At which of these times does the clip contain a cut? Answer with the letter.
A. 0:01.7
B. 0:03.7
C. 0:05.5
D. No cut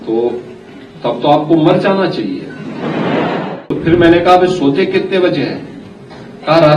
B